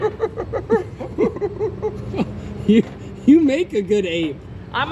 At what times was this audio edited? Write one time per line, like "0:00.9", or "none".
none